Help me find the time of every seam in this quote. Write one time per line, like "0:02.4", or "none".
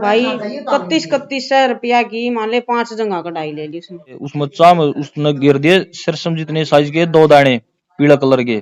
0:04.2

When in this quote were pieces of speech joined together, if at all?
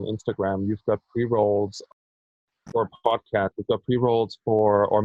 none

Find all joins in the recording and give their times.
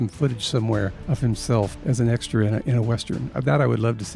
0:01.0
0:01.8

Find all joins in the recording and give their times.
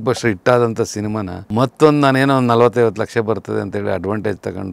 0:01.3

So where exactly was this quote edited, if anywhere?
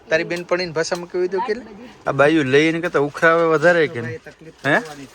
0:01.9

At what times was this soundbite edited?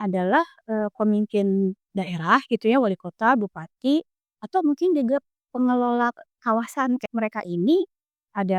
0:07.1

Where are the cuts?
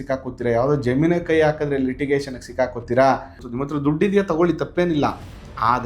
0:03.4

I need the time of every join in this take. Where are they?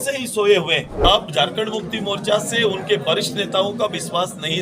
0:01.0

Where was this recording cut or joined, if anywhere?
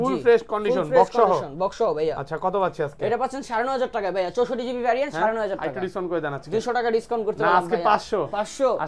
none

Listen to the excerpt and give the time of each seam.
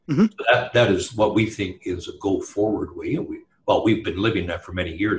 none

